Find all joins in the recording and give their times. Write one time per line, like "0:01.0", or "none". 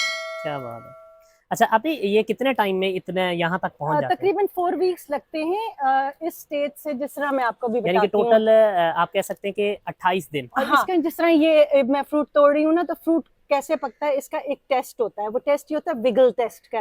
0:10.7